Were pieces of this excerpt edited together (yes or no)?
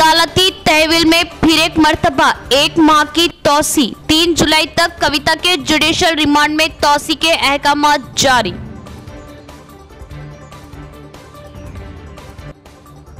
no